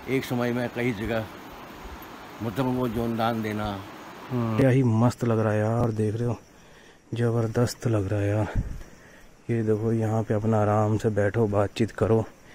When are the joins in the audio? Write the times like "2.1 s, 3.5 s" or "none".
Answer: 4.6 s